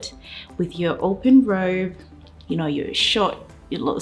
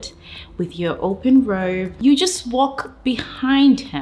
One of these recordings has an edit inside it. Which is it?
second; 1 cut; at 1.9 s

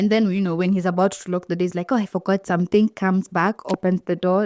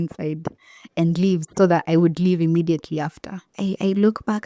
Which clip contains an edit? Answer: second; 1 cut; at 3.5 s

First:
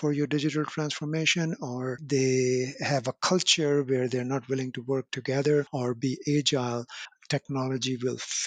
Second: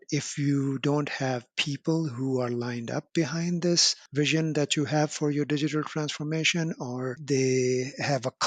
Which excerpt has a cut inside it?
second; 1 cut; at 4.0 s

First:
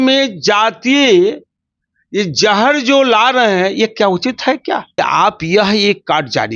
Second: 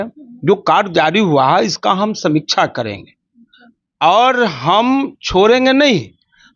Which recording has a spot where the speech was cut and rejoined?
first; 1 cut; at 4.9 s

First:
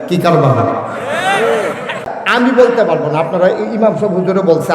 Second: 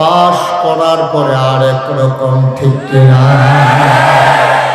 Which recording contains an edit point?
first; 1 cut; at 2.1 s

